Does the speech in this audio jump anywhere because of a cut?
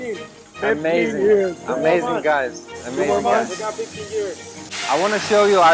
yes; 1 cut; at 4.6 s

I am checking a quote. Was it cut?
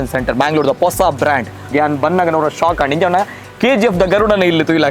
yes; 1 cut; at 1.7 s

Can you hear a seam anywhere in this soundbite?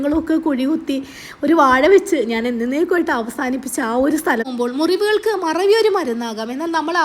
yes; 1 cut; at 4.5 s

